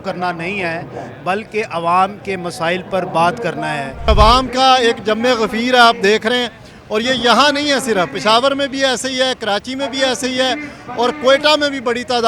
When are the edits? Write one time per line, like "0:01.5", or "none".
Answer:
0:04.1